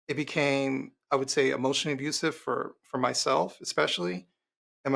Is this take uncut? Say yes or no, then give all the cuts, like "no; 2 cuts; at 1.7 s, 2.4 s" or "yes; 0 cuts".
yes; 0 cuts